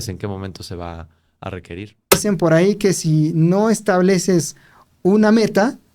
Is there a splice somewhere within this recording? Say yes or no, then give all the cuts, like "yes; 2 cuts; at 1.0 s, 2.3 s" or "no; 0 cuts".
yes; 1 cut; at 2.2 s